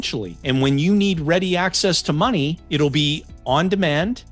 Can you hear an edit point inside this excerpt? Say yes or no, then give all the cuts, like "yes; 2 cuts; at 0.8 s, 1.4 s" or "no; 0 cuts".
no; 0 cuts